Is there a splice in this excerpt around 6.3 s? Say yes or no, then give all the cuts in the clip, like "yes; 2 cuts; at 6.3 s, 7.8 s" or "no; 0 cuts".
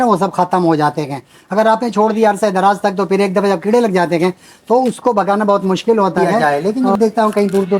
yes; 1 cut; at 6.3 s